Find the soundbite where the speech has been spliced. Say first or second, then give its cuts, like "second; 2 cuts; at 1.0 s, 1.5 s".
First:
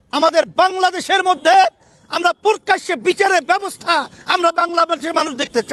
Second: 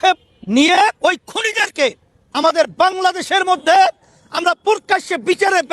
second; 1 cut; at 1.0 s